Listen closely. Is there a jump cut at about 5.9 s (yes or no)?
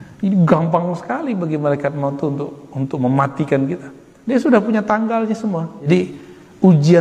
yes